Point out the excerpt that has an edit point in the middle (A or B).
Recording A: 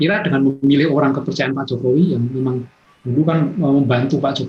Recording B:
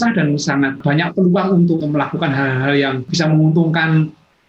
B